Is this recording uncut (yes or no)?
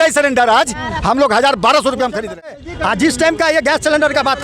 no